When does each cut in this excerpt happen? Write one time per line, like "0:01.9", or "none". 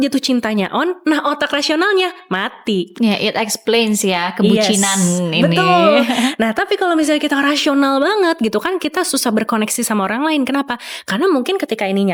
none